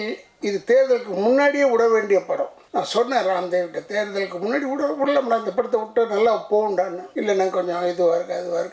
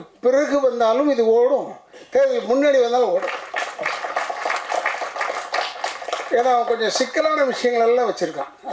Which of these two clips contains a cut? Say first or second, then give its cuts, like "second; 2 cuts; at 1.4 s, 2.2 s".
first; 2 cuts; at 2.6 s, 7.0 s